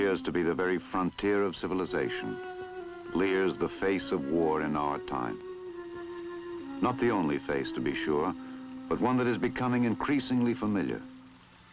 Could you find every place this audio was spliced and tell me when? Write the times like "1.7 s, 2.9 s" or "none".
none